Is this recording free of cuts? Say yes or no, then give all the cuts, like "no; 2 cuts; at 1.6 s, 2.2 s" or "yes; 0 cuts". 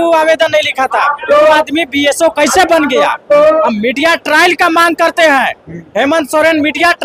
yes; 0 cuts